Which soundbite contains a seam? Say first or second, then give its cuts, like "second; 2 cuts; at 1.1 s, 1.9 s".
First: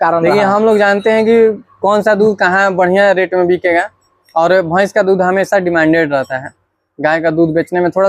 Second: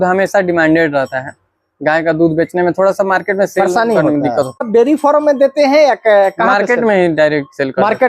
second; 1 cut; at 4.7 s